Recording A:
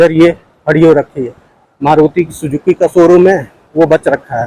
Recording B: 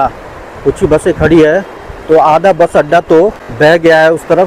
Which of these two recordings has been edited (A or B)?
B